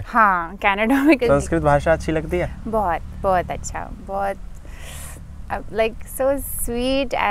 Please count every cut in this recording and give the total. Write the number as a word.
one